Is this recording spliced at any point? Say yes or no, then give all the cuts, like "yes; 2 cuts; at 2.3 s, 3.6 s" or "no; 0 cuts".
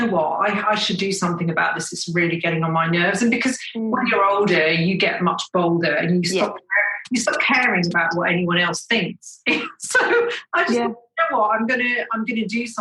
no; 0 cuts